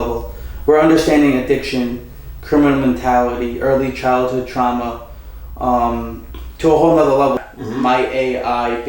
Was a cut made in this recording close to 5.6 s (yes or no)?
no